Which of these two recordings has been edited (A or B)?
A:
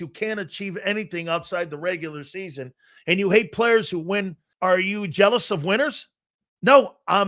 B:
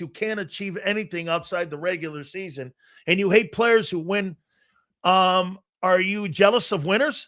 A